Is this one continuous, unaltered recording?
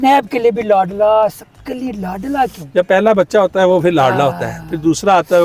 no; 1 cut; at 2.6 s

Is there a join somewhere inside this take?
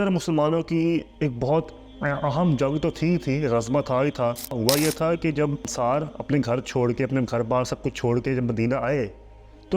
yes; 3 cuts; at 1.1 s, 4.6 s, 5.7 s

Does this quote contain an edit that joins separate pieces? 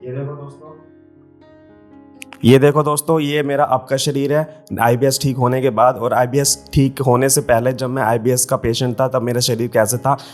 yes; 2 cuts; at 0.7 s, 2.4 s

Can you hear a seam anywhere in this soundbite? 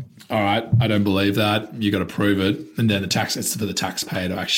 no; 0 cuts

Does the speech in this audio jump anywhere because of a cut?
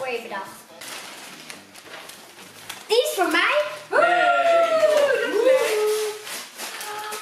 yes; 1 cut; at 0.9 s

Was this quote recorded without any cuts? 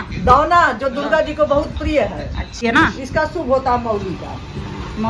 no; 1 cut; at 2.6 s

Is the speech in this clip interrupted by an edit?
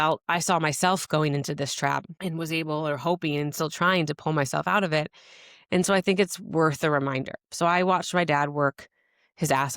yes; 1 cut; at 2.1 s

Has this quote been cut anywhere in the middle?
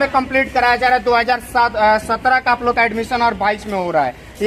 no; 0 cuts

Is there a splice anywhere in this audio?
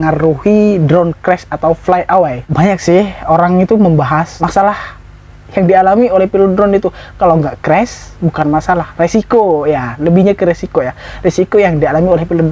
no; 0 cuts

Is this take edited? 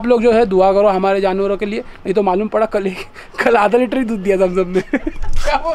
no; 0 cuts

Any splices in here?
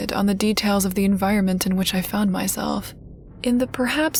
no; 0 cuts

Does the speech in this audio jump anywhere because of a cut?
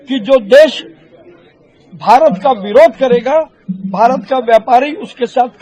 no; 0 cuts

